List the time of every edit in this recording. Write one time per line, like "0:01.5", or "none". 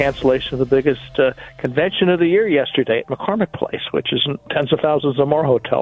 0:04.4